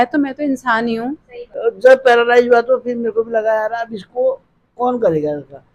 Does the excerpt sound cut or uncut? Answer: cut